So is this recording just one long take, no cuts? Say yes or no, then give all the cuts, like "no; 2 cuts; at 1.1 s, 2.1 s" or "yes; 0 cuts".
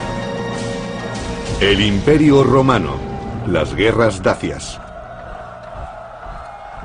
yes; 0 cuts